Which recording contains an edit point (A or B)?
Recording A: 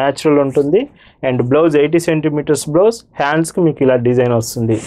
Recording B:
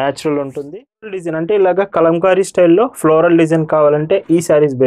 B